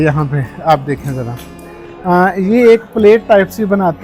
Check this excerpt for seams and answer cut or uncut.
uncut